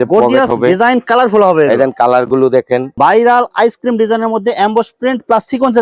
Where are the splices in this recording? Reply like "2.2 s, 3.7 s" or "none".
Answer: 3.0 s